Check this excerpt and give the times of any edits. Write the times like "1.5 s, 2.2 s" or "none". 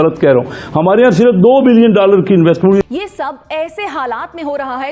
2.8 s